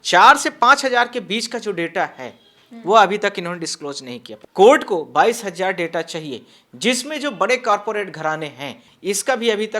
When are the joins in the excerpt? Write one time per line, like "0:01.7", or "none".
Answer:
0:04.2
0:08.8